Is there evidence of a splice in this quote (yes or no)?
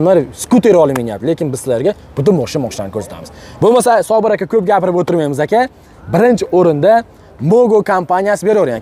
no